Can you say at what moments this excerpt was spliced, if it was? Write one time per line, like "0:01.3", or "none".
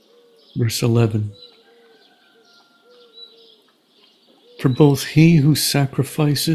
0:01.3
0:04.6